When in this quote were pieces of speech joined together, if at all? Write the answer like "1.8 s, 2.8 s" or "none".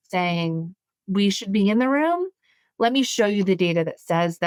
none